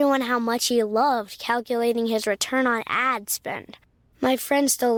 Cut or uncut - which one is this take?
uncut